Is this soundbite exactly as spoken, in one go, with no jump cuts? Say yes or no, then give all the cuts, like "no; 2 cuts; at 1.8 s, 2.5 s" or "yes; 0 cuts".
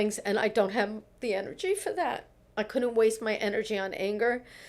no; 1 cut; at 2.4 s